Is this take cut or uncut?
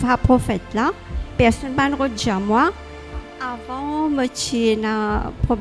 cut